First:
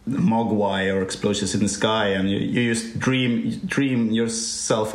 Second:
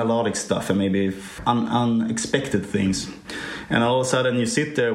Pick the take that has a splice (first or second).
second